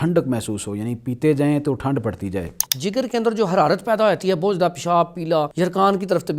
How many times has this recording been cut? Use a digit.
2